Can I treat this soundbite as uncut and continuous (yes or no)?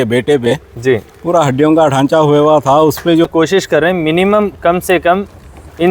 no